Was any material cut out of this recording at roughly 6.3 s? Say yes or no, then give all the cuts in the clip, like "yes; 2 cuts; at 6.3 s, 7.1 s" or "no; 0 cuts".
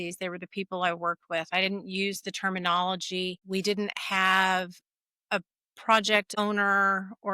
yes; 2 cuts; at 3.4 s, 6.3 s